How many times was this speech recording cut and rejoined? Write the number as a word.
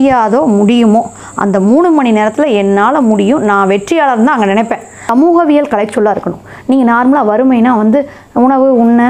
one